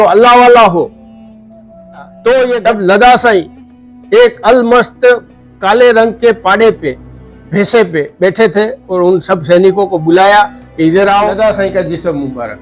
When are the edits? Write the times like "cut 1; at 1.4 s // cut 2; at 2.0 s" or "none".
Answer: cut 1; at 2.6 s // cut 2; at 11.3 s